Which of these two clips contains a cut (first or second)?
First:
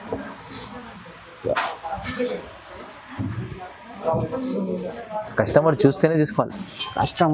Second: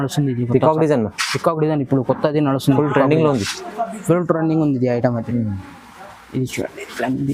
first